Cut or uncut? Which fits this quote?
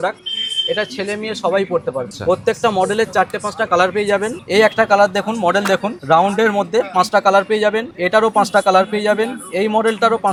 uncut